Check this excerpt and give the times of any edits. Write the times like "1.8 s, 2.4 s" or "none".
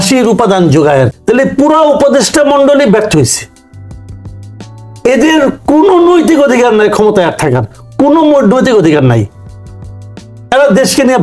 1.1 s